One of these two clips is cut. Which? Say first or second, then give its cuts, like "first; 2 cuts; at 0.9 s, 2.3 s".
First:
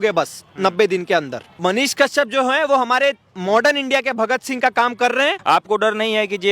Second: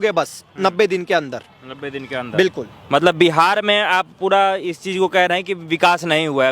first; 2 cuts; at 1.6 s, 5.4 s